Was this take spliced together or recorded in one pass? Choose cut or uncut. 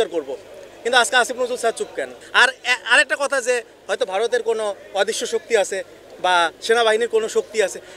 uncut